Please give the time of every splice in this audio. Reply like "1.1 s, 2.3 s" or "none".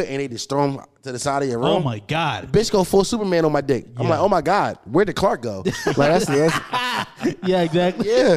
2.4 s